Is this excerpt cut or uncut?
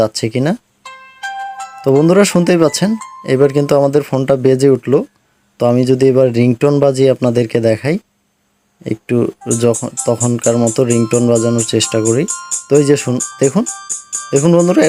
uncut